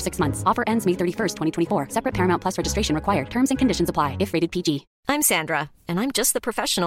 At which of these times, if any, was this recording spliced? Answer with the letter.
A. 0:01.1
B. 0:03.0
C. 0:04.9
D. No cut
C